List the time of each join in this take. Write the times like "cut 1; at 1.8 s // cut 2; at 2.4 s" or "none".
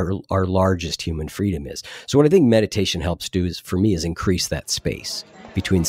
none

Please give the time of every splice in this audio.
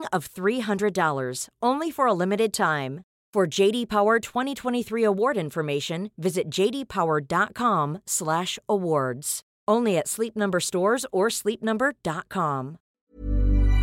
cut 1; at 12.9 s

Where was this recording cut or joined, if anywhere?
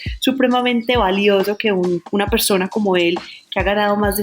cut 1; at 2.1 s

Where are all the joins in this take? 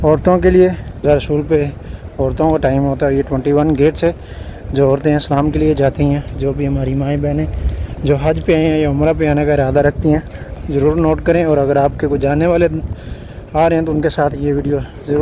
cut 1; at 1.0 s // cut 2; at 10.6 s

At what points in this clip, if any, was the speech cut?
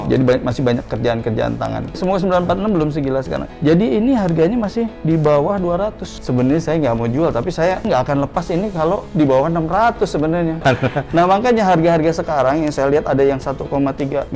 cut 1; at 2.0 s // cut 2; at 6.1 s // cut 3; at 10.6 s

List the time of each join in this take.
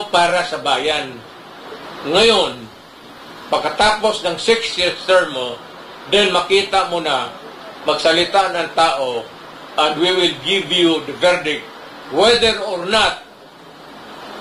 none

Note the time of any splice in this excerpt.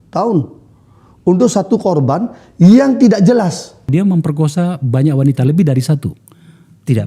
cut 1; at 3.8 s

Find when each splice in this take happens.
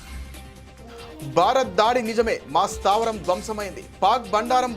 cut 1; at 1.4 s

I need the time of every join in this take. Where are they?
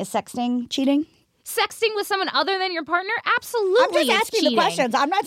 cut 1; at 1.2 s

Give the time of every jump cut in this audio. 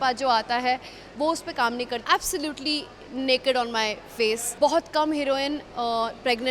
cut 1; at 2.0 s // cut 2; at 4.5 s

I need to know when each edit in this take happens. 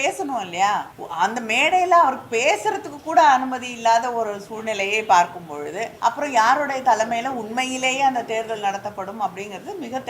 cut 1; at 1.0 s // cut 2; at 5.9 s

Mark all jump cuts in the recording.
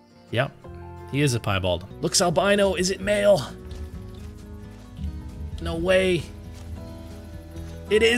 cut 1; at 1.9 s

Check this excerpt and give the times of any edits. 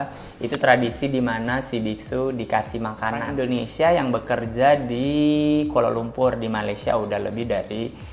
cut 1; at 3.3 s

